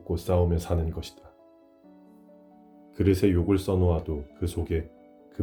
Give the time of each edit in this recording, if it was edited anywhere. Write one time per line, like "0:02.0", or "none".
none